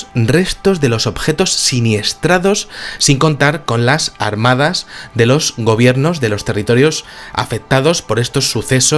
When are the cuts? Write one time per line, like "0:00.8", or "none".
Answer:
none